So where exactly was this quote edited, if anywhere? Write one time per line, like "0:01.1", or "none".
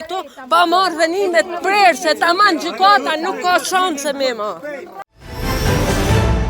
0:04.8